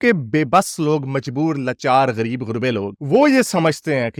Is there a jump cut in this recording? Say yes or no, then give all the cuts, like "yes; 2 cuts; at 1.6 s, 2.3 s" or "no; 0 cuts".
no; 0 cuts